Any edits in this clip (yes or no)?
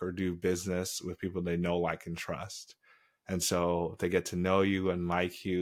no